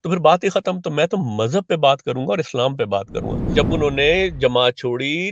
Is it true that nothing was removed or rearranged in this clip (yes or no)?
no